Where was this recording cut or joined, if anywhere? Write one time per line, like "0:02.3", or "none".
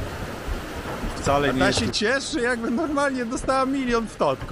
0:01.7

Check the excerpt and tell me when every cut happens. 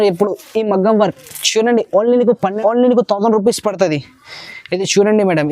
0:02.5

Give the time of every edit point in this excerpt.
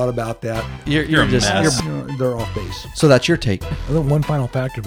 0:03.7

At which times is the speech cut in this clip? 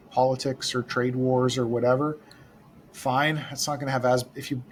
none

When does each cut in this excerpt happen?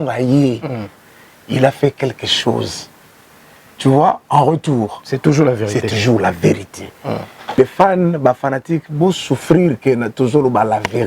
0:07.6

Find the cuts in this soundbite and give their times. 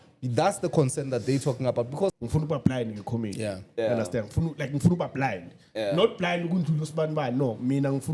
0:02.1

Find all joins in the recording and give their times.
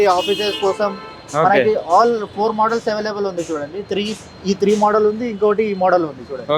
none

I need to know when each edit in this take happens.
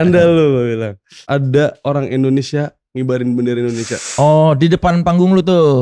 0:01.2

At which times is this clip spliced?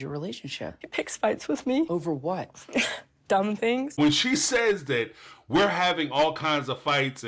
0:00.8
0:01.9
0:04.0

